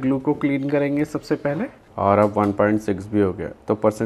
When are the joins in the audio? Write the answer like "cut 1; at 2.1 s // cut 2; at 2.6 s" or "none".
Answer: cut 1; at 1.8 s